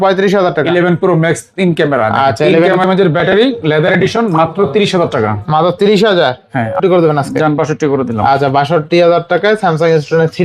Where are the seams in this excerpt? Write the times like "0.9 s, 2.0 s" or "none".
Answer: 2.8 s, 6.7 s